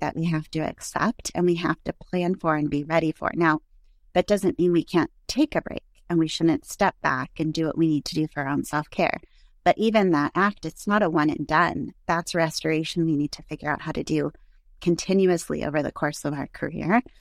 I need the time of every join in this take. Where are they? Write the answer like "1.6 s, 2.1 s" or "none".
none